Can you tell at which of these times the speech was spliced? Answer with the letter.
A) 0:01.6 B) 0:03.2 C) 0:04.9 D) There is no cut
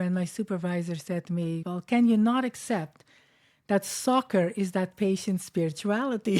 A